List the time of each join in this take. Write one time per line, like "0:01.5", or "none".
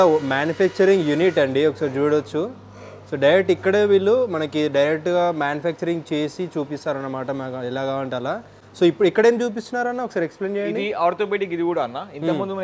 none